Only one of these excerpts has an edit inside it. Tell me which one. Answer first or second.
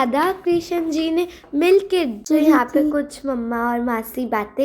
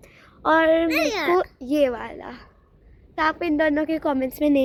first